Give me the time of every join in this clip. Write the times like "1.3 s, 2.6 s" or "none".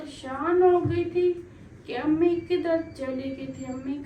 none